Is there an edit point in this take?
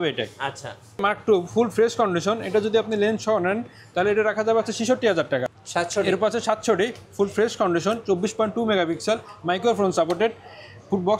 yes; 2 cuts; at 1.0 s, 5.5 s

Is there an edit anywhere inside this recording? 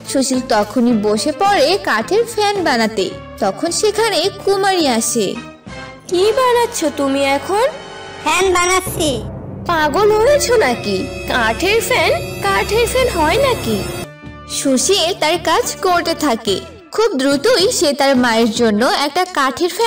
no; 0 cuts

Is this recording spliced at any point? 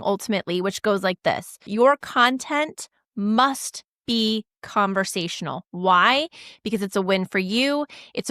yes; 1 cut; at 1.6 s

